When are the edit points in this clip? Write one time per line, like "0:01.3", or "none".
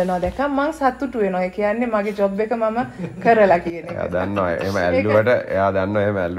none